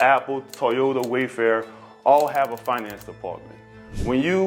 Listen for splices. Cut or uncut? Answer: uncut